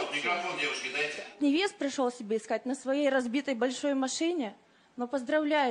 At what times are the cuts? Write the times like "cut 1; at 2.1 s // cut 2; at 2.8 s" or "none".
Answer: cut 1; at 1.3 s